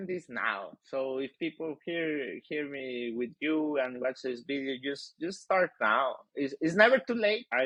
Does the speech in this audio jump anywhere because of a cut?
no; 0 cuts

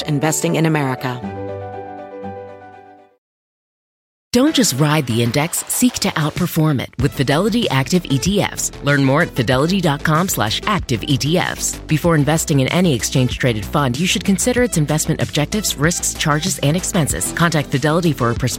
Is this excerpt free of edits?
no; 1 cut; at 1.2 s

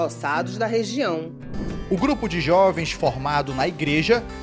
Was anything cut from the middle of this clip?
yes; 1 cut; at 1.5 s

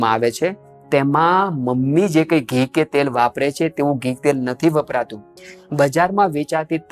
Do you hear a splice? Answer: no; 0 cuts

